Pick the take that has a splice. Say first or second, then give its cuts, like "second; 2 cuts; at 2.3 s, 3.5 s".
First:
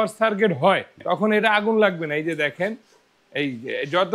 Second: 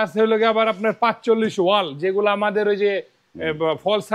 first; 1 cut; at 0.9 s